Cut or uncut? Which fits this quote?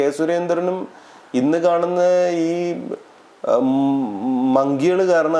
uncut